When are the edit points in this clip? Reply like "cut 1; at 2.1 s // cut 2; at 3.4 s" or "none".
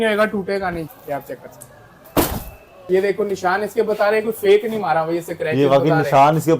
cut 1; at 0.9 s // cut 2; at 2.9 s